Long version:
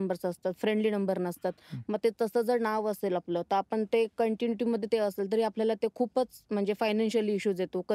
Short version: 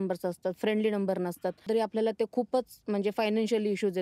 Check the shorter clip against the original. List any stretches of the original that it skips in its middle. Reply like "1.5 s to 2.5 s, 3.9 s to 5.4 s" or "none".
1.6 s to 5.2 s